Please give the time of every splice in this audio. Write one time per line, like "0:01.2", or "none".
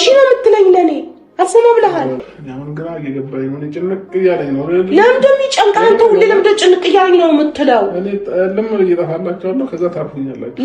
0:02.3

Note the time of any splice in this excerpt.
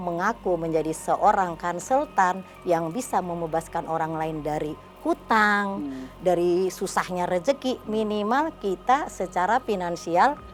none

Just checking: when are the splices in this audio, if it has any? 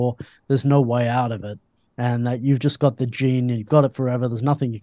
none

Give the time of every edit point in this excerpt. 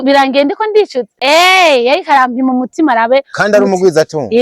0:01.0

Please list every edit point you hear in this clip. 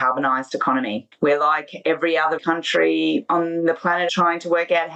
0:01.0
0:02.4
0:03.2
0:04.1

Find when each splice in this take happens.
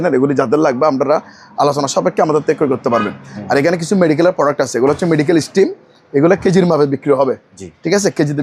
none

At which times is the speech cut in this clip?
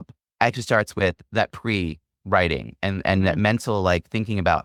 none

